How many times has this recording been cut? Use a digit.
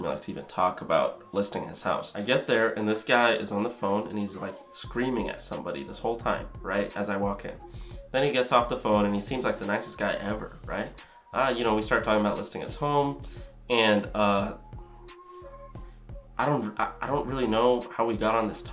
1